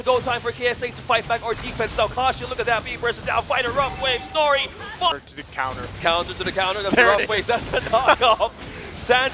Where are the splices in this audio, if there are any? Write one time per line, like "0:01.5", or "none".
0:05.1